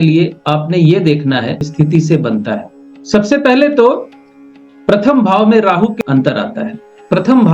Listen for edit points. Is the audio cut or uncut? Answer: cut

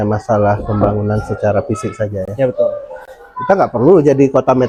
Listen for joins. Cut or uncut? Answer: uncut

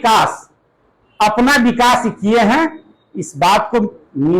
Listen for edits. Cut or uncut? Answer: uncut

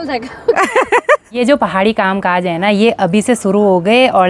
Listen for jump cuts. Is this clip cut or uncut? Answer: cut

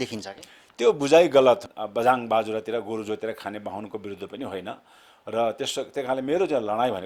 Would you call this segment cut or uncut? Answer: cut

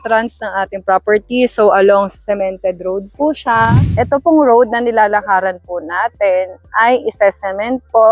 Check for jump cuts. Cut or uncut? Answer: cut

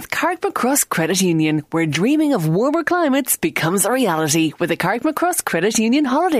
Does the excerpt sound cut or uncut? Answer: uncut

